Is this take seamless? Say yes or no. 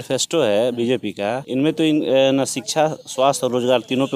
no